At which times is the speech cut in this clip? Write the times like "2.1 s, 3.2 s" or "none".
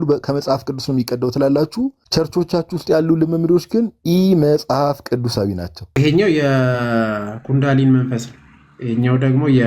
2.0 s, 5.8 s